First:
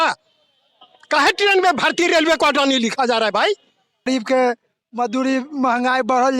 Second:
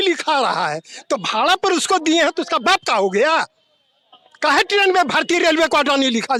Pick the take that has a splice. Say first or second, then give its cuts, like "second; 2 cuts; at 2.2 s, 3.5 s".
first; 1 cut; at 4.1 s